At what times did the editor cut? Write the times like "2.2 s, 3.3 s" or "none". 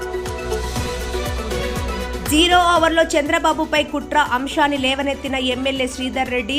1.3 s, 2.1 s